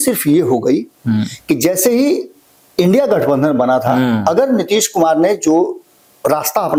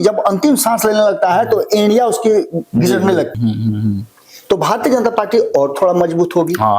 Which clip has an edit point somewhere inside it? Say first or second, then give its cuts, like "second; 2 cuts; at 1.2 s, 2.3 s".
second; 1 cut; at 3.3 s